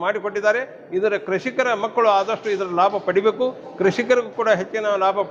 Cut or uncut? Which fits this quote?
uncut